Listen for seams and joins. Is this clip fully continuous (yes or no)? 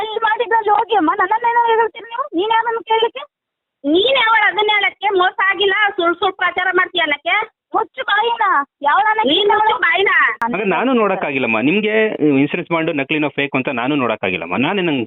no